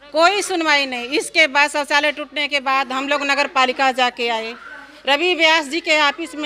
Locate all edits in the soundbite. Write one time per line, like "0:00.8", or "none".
none